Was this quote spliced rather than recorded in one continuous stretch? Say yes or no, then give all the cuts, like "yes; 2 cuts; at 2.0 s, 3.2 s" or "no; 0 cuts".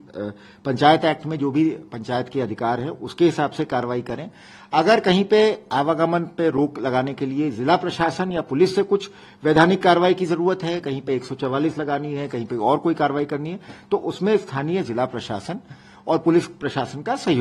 no; 0 cuts